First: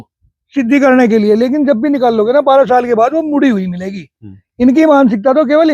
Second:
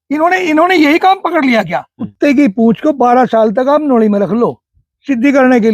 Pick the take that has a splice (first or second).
second